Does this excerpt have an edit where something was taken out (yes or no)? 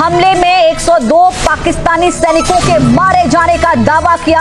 no